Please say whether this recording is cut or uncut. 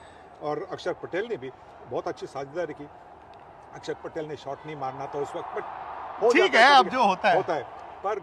uncut